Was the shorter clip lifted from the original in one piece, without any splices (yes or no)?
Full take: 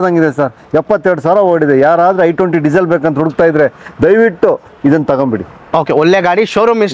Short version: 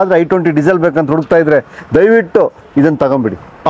yes